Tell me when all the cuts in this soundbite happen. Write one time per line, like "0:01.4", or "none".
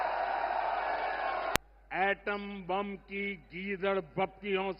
0:01.5